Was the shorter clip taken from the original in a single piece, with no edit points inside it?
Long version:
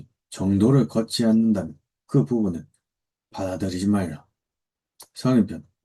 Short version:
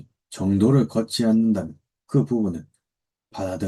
yes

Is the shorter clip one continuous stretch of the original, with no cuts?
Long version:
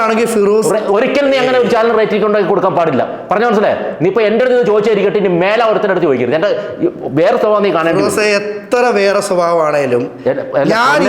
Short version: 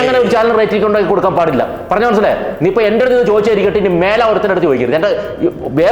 yes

